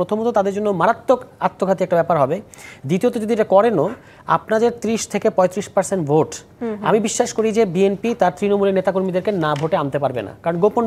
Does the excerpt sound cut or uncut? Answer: uncut